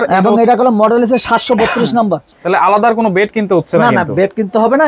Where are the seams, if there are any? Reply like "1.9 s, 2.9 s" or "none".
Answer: 2.3 s